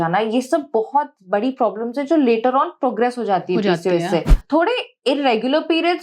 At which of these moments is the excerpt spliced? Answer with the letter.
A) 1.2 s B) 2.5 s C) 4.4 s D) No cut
C